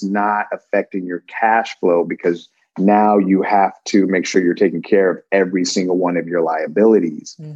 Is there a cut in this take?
no; 0 cuts

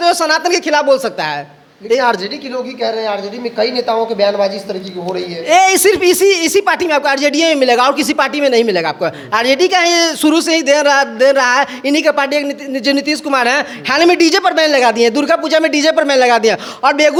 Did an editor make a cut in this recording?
no; 0 cuts

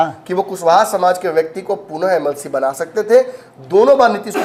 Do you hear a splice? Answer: no; 0 cuts

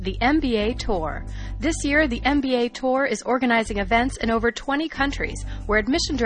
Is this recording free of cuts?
yes; 0 cuts

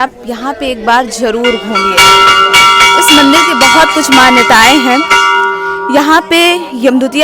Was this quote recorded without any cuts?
yes; 0 cuts

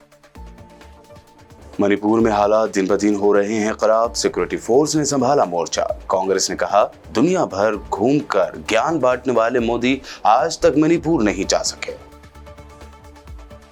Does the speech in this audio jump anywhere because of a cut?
no; 0 cuts

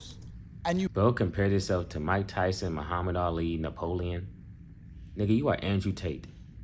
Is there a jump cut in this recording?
no; 0 cuts

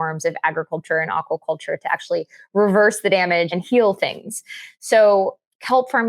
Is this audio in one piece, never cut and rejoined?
no; 1 cut; at 3.5 s

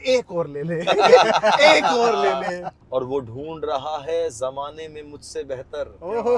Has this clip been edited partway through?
yes; 1 cut; at 2.7 s

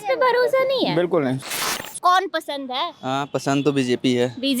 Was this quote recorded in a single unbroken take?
no; 1 cut; at 1.5 s

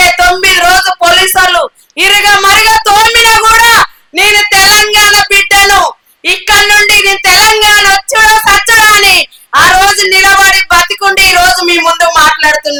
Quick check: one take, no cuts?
yes; 0 cuts

